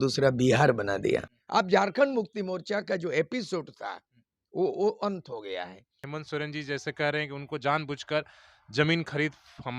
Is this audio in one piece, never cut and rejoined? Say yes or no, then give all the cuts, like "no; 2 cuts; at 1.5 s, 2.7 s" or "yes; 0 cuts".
no; 2 cuts; at 1.4 s, 6.0 s